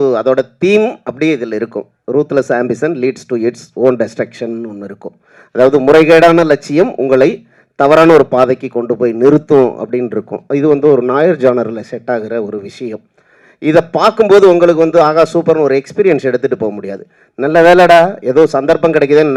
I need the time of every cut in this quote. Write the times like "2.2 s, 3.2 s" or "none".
none